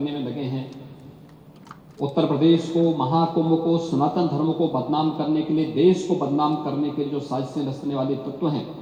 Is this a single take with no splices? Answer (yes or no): yes